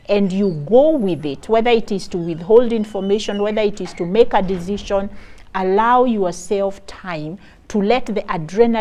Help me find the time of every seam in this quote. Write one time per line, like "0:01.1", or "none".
none